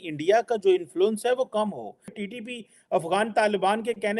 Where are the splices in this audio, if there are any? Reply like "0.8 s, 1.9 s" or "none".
2.2 s

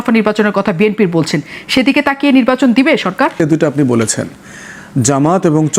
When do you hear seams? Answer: 3.4 s

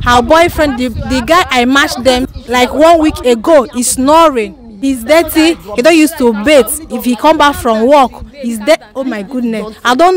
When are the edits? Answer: 2.3 s, 4.7 s

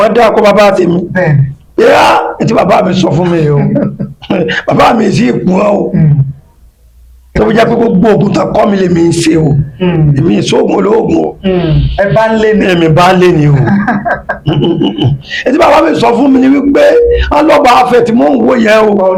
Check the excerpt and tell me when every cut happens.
none

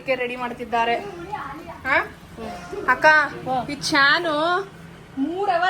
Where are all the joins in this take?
none

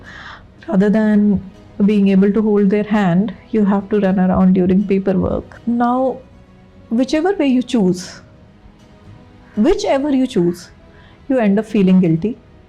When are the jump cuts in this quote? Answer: 5.5 s

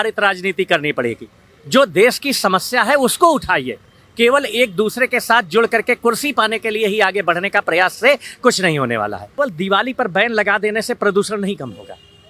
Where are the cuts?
9.4 s

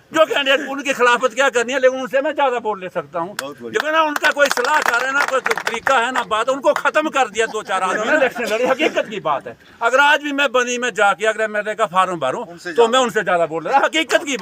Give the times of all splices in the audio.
none

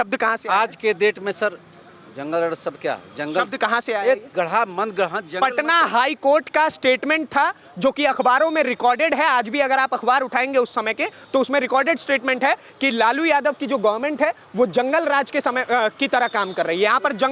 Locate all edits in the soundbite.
none

